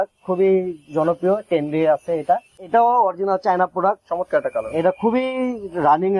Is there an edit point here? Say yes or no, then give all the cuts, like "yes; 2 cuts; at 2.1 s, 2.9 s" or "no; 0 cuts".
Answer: yes; 1 cut; at 2.5 s